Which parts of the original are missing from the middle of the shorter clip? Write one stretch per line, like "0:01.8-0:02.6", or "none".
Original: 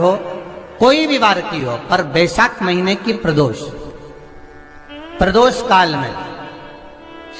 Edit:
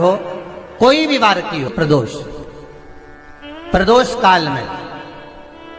0:01.7-0:03.2